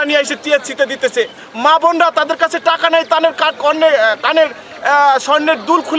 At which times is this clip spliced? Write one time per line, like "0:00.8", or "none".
none